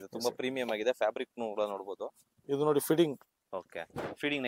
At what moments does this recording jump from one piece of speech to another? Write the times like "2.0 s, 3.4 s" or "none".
2.3 s

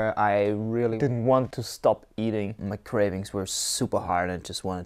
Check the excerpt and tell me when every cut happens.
1.0 s, 1.6 s, 2.6 s

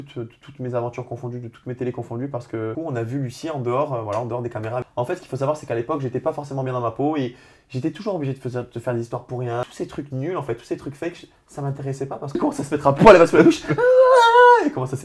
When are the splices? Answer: 2.8 s, 4.8 s, 9.6 s, 12.4 s

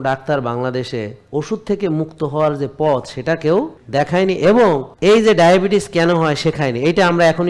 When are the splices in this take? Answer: 3.8 s, 4.9 s

